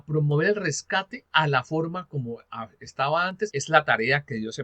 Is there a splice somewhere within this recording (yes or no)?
yes